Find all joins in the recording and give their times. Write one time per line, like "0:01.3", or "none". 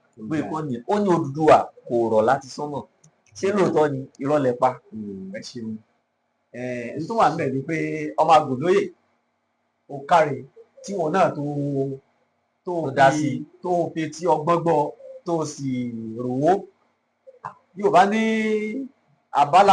none